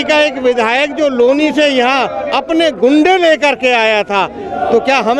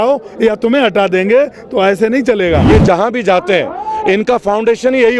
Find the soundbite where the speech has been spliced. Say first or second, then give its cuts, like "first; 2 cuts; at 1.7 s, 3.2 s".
second; 1 cut; at 2.7 s